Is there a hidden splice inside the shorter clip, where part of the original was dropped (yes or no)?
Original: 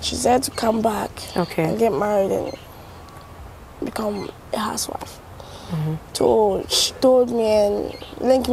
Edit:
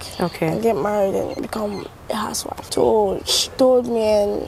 yes